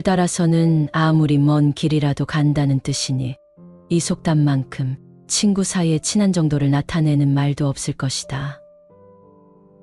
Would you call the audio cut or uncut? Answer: uncut